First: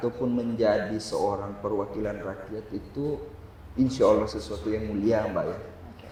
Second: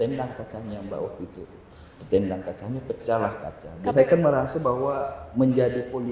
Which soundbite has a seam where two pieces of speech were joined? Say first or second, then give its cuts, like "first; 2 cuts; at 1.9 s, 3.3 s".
second; 1 cut; at 3.9 s